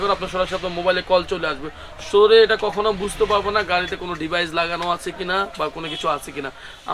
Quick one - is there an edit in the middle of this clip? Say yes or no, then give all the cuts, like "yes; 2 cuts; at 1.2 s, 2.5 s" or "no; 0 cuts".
no; 0 cuts